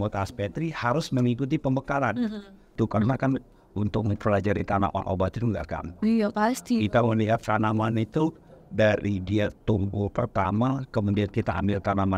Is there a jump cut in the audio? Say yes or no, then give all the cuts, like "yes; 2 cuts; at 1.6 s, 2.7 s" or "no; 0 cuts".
yes; 1 cut; at 2.7 s